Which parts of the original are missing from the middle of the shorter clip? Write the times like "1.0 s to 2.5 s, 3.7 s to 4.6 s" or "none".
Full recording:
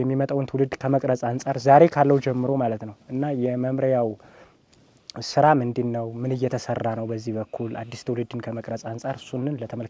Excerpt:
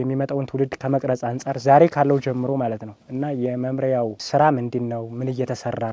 4.2 s to 5.2 s